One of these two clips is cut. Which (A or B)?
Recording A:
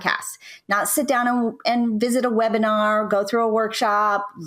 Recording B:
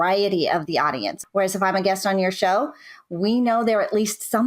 B